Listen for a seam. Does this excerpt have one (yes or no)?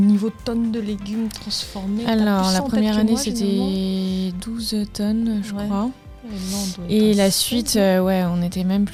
no